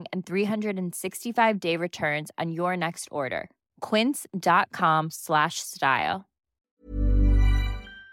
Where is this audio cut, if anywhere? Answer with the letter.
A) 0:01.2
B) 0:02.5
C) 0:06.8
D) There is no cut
C